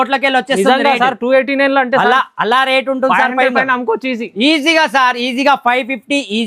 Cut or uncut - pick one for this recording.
uncut